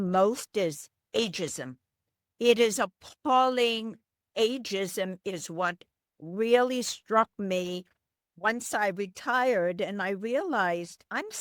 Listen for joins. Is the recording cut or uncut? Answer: cut